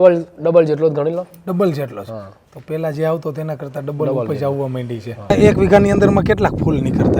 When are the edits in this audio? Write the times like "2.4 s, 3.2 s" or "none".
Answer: 5.3 s